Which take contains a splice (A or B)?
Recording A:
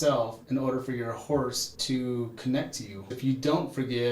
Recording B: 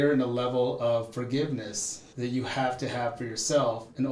A